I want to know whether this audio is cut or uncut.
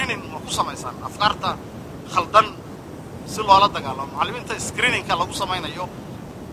uncut